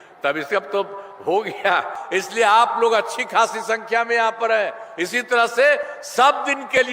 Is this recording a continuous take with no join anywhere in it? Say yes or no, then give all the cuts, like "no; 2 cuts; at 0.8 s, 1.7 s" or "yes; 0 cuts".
no; 1 cut; at 2.0 s